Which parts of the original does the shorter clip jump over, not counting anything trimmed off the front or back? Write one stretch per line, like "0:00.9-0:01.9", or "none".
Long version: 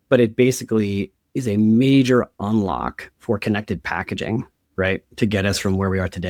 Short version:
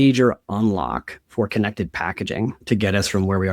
0:04.5-0:05.1